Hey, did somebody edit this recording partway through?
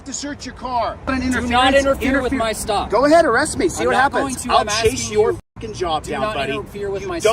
yes; 1 cut; at 1.1 s

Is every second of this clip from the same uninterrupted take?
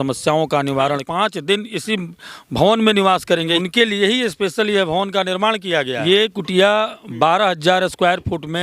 no; 3 cuts; at 1.0 s, 3.6 s, 6.0 s

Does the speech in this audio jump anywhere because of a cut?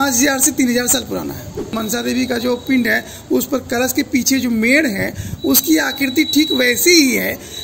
yes; 1 cut; at 1.7 s

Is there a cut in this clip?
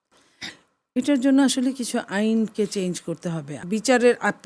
yes; 1 cut; at 3.6 s

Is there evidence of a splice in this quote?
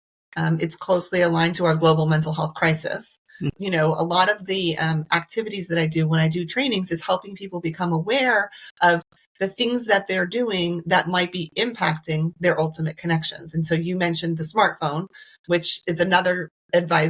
yes; 1 cut; at 3.5 s

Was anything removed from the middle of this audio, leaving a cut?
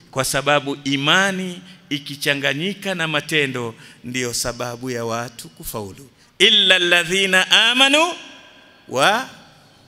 no; 0 cuts

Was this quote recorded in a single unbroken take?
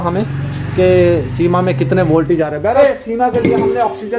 no; 1 cut; at 2.8 s

